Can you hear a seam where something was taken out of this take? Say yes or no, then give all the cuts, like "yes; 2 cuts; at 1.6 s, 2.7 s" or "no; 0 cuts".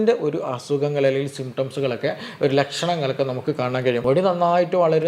yes; 1 cut; at 4.0 s